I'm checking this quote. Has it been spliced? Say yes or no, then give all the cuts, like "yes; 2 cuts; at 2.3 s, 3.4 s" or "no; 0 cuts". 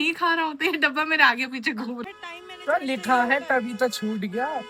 yes; 1 cut; at 2.0 s